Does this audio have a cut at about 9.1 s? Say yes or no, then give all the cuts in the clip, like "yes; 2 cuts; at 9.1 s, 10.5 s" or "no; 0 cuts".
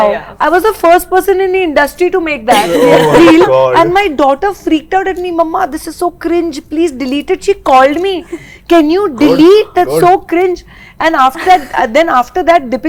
no; 0 cuts